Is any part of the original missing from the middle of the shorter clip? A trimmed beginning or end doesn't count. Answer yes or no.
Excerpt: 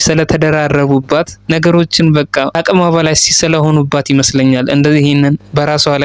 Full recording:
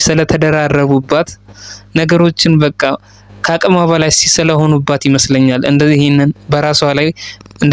yes